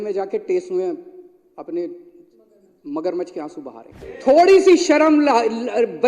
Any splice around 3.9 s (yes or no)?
yes